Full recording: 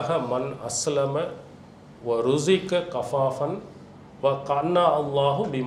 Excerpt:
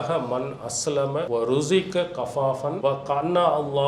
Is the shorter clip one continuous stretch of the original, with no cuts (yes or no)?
no